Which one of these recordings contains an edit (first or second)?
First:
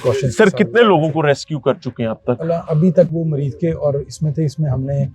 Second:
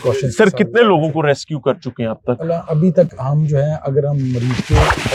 first